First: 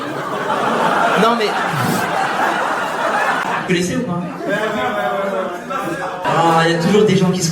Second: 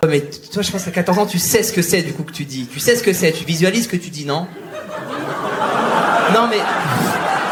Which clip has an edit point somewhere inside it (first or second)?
first